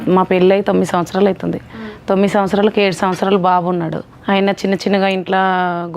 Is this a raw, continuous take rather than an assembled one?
no; 1 cut; at 4.1 s

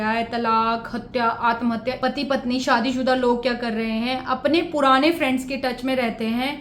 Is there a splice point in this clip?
yes; 1 cut; at 2.0 s

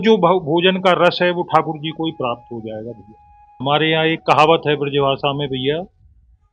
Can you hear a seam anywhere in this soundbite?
yes; 1 cut; at 3.6 s

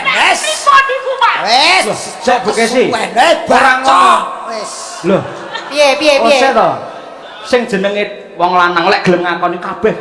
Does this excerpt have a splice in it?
no; 0 cuts

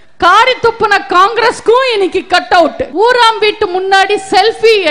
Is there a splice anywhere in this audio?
yes; 1 cut; at 2.8 s

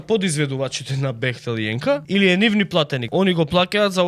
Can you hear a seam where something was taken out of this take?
yes; 2 cuts; at 2.0 s, 3.0 s

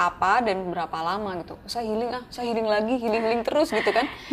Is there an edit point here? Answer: no; 0 cuts

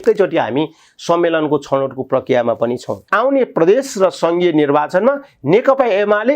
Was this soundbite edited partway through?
yes; 1 cut; at 3.0 s

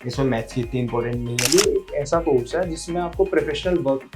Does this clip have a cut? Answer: yes; 1 cut; at 1.4 s

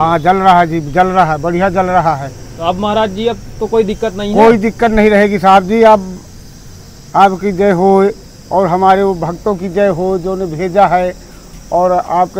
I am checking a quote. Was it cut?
no; 0 cuts

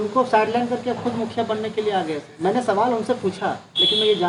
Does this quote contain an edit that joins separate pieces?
no; 0 cuts

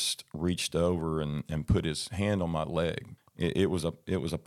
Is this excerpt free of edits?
no; 1 cut; at 3.1 s

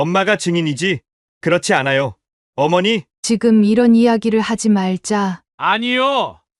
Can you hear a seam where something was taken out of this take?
yes; 1 cut; at 3.1 s

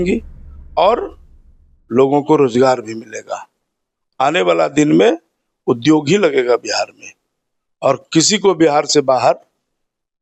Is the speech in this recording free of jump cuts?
yes; 0 cuts

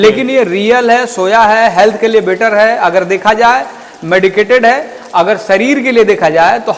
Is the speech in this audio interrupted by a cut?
no; 0 cuts

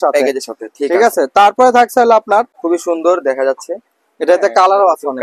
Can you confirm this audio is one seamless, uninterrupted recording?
no; 1 cut; at 2.6 s

